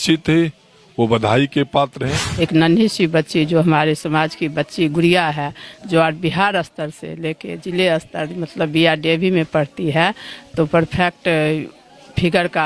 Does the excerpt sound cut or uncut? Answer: cut